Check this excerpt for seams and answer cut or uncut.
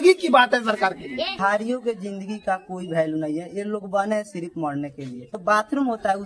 cut